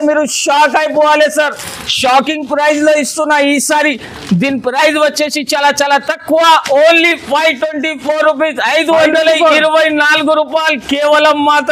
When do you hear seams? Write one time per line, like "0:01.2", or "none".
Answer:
none